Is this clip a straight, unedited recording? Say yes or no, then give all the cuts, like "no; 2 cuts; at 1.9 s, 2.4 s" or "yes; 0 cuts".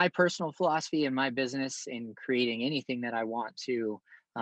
yes; 0 cuts